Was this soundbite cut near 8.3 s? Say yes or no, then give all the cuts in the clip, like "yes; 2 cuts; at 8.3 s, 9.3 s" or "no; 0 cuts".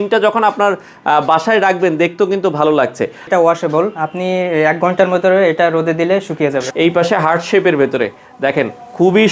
no; 2 cuts; at 3.3 s, 6.6 s